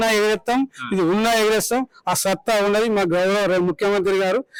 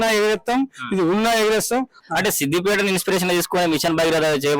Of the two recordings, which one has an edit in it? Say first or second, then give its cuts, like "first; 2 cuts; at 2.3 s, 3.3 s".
second; 1 cut; at 2.0 s